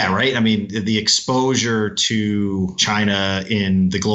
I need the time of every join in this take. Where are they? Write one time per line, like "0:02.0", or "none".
0:02.8